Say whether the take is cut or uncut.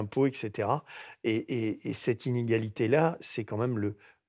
uncut